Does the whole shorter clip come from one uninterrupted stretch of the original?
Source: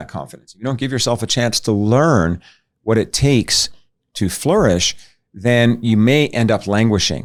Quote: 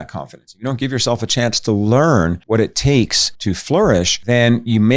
no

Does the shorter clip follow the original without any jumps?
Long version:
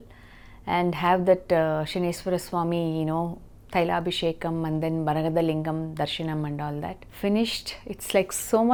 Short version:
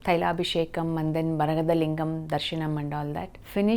yes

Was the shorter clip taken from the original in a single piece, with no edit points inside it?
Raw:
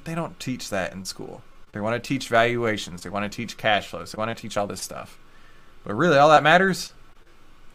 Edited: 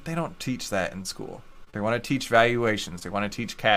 yes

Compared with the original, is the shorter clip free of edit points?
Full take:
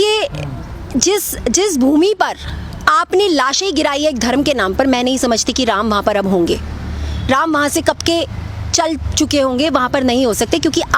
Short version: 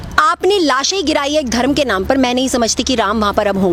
yes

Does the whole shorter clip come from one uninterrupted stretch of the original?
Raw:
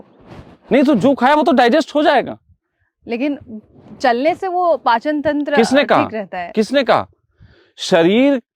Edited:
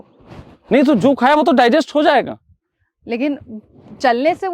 yes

